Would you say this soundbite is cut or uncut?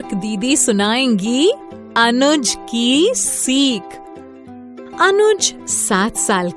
uncut